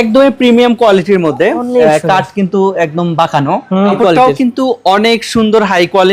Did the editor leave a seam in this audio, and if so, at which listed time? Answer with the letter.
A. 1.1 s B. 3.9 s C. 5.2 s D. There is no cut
B